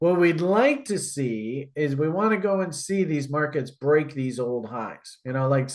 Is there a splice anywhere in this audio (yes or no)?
no